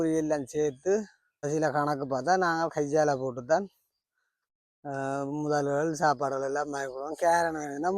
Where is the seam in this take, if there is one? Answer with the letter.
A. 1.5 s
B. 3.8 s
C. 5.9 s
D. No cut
A